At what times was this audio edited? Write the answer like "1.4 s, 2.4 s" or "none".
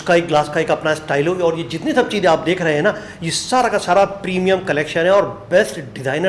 none